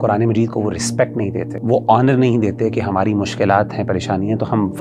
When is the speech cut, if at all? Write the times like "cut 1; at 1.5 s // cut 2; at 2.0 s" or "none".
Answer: cut 1; at 1.5 s